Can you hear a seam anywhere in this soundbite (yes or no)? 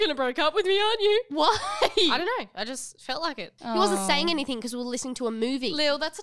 yes